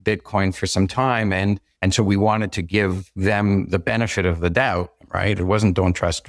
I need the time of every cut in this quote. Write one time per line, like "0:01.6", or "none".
0:01.7
0:03.1
0:05.0